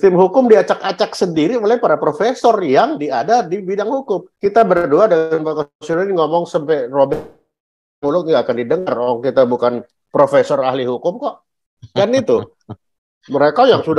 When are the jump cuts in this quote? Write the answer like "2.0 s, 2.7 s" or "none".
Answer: none

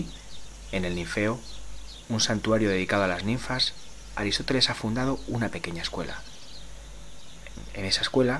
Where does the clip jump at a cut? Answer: 3.3 s

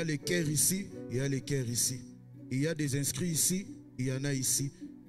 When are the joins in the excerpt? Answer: none

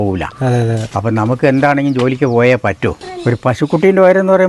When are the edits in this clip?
3.1 s

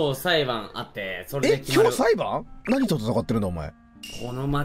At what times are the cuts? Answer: 2.6 s

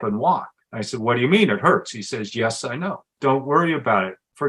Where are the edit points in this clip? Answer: 3.1 s

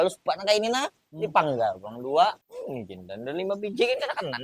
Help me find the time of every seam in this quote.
none

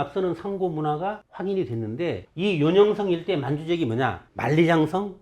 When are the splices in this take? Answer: 1.3 s, 2.3 s, 4.3 s

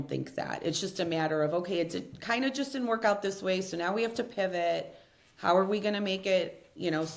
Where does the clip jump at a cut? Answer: none

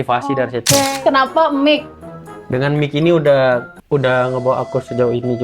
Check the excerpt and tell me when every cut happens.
0.9 s

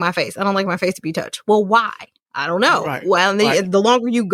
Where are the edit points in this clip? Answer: none

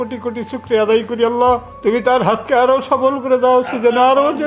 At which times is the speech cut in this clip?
1.7 s

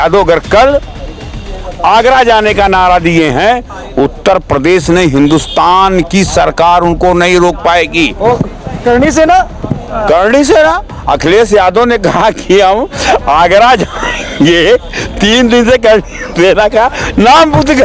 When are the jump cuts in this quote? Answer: none

